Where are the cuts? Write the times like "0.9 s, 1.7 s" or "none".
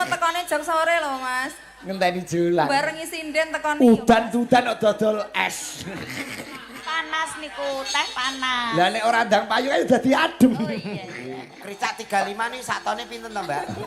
11.6 s

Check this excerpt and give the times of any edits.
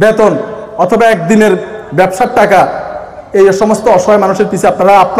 none

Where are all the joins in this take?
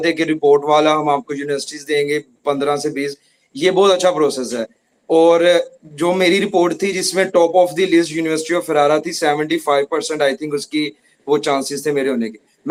none

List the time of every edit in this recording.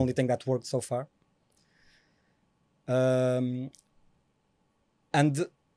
none

